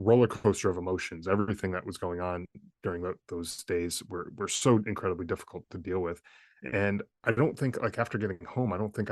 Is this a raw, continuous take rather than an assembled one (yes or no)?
no